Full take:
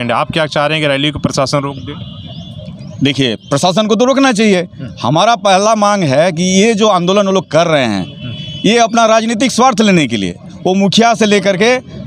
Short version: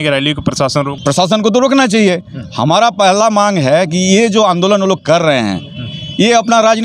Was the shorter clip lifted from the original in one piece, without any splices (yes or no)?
no